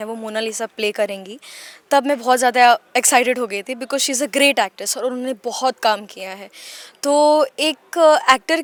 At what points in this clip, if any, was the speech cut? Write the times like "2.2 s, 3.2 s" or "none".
none

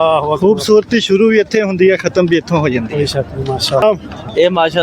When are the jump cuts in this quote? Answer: 3.8 s

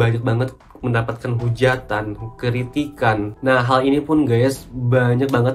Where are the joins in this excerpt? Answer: 3.3 s

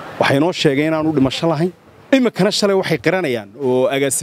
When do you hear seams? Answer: 1.9 s

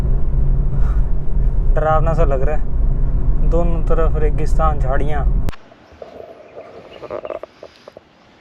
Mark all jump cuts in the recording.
5.5 s

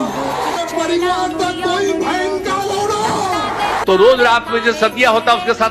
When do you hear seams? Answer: none

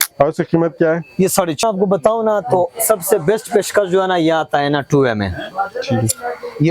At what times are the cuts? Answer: 1.6 s

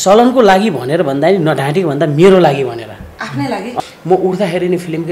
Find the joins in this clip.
3.8 s

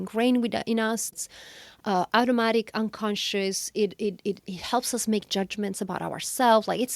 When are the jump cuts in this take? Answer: 1.1 s

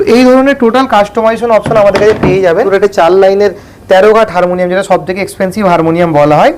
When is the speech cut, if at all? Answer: 2.7 s

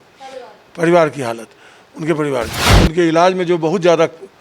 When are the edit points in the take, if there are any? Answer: 2.6 s

